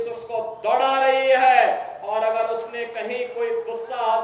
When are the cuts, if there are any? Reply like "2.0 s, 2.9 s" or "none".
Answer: none